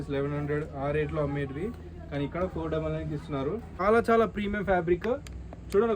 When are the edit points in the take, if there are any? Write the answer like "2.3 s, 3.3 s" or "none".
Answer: 3.7 s